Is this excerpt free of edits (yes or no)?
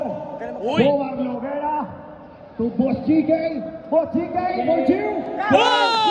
yes